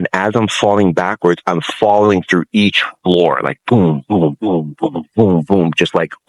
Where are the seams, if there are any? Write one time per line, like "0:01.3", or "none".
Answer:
none